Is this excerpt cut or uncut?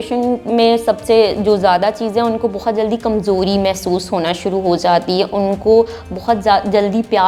uncut